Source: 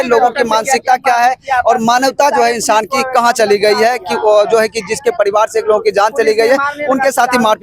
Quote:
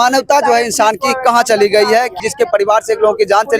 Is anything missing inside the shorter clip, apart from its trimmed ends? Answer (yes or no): yes